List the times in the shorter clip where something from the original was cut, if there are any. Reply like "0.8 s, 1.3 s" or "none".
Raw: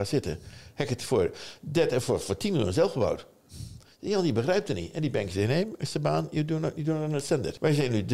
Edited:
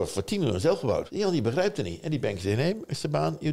1.1 s